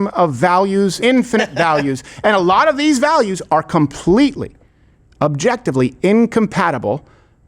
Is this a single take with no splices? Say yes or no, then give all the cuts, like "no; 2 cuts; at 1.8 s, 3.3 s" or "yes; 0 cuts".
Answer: no; 1 cut; at 1.0 s